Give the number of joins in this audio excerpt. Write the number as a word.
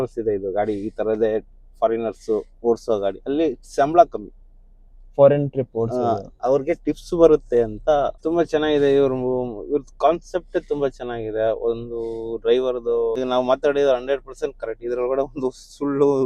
two